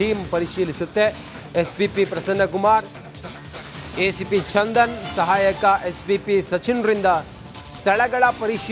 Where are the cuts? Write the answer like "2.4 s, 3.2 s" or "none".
2.5 s